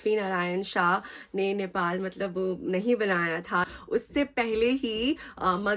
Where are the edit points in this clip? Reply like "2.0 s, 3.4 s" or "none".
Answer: 3.7 s